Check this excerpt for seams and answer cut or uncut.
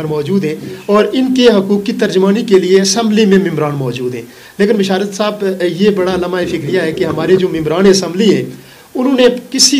uncut